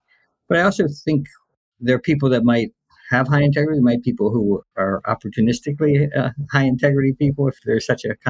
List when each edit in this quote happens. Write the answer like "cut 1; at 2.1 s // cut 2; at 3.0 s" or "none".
cut 1; at 4.7 s // cut 2; at 7.6 s